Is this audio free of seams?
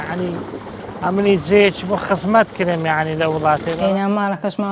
no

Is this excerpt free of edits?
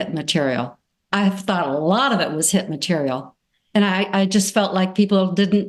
yes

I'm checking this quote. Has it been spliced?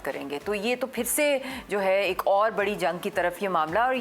no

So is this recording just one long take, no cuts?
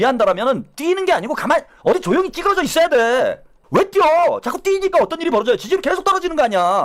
yes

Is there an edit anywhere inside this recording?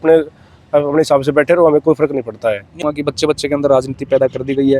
yes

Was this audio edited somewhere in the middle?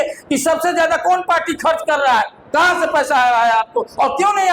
no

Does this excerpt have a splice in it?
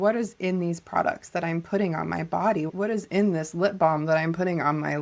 yes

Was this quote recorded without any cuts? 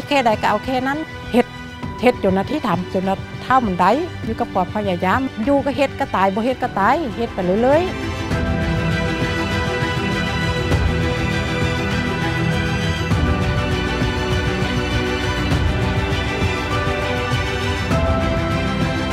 no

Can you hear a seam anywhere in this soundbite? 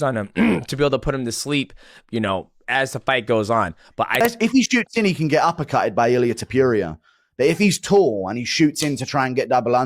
yes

